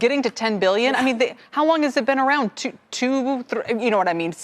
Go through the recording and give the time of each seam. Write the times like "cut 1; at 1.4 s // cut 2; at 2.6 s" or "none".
cut 1; at 1.4 s